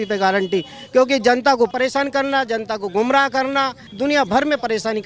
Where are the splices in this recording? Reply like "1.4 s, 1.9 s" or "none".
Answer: 1.7 s, 3.8 s